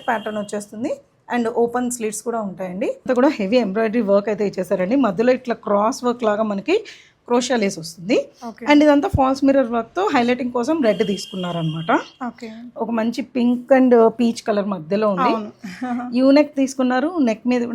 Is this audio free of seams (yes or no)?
no